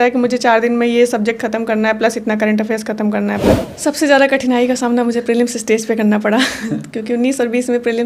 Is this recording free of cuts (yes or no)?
no